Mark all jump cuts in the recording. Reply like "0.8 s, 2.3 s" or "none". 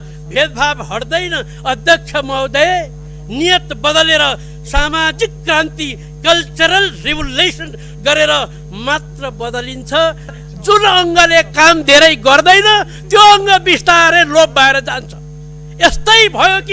10.4 s